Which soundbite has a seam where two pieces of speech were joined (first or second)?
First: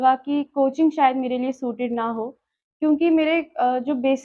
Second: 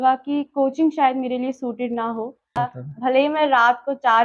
second